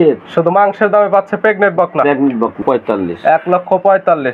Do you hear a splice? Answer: yes; 1 cut; at 2.6 s

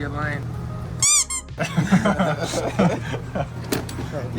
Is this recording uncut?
yes; 0 cuts

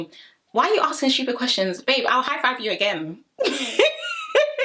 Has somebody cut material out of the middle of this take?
no; 0 cuts

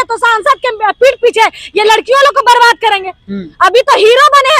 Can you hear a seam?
no; 0 cuts

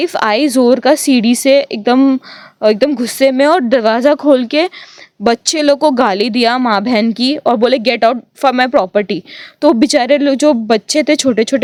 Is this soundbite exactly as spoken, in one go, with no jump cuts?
yes; 0 cuts

